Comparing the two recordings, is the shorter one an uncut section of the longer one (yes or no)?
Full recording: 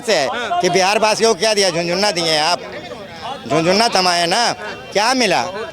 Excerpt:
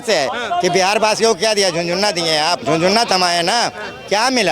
no